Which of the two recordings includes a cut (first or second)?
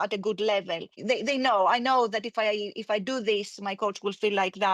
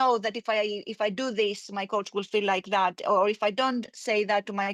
first